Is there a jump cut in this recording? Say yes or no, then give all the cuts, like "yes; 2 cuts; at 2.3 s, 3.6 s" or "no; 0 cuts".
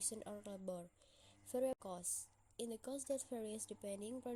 no; 0 cuts